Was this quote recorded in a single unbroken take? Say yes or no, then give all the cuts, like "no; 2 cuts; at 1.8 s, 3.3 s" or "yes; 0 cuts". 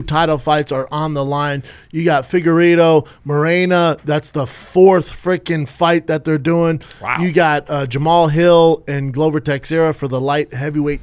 yes; 0 cuts